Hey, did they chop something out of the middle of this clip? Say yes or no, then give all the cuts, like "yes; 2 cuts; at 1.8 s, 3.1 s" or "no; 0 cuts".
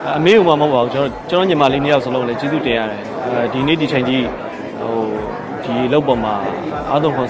no; 0 cuts